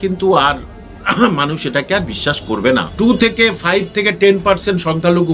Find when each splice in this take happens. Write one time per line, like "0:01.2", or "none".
0:02.9